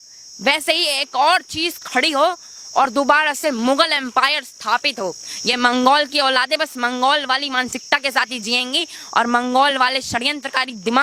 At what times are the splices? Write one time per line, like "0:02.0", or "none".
none

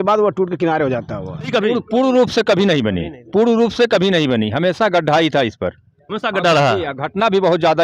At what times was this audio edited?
0:01.5

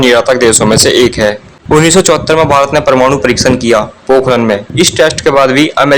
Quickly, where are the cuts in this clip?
0:04.7

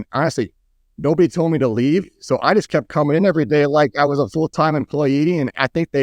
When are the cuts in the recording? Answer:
none

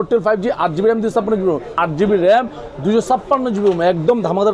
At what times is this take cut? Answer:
0:01.8

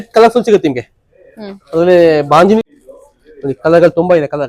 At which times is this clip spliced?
0:02.6

